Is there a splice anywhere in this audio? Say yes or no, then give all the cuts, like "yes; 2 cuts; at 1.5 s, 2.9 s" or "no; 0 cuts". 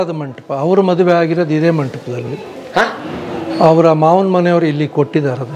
no; 0 cuts